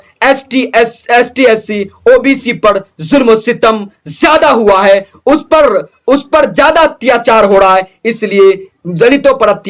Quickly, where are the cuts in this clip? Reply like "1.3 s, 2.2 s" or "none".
none